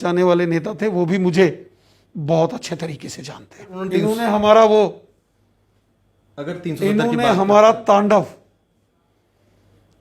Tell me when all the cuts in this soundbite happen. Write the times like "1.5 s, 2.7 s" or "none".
3.8 s